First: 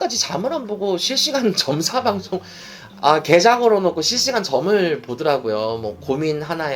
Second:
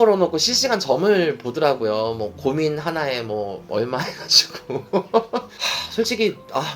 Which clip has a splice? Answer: second; 1 cut; at 5.6 s

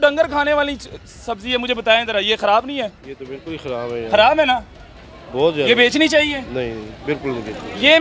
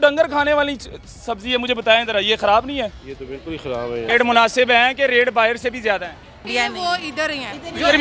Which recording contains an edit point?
second; 2 cuts; at 4.1 s, 6.5 s

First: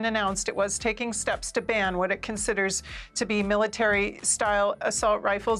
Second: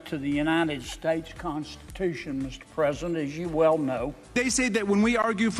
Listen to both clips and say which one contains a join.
second; 1 cut; at 4.2 s

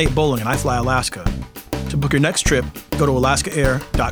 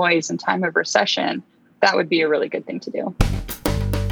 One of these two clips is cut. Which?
second; 1 cut; at 3.1 s

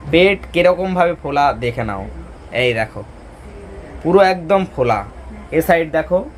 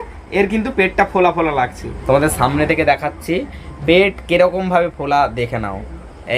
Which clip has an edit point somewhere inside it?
second; 1 cut; at 1.9 s

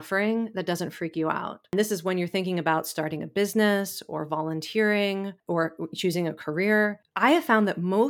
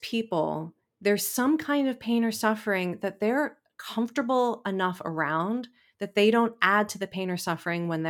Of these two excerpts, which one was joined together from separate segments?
first; 3 cuts; at 1.7 s, 5.4 s, 7.0 s

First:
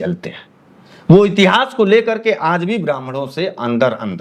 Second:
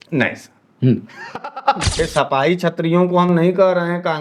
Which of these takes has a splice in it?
second; 1 cut; at 2.1 s

